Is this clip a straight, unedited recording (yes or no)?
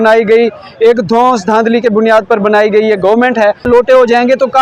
no